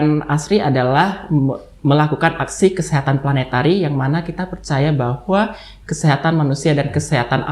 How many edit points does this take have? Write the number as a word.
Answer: zero